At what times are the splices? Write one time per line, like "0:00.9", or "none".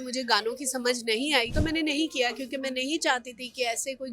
0:01.5